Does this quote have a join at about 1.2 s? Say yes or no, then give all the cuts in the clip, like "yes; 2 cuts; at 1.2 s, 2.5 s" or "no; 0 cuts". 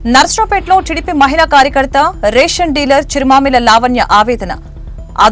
no; 0 cuts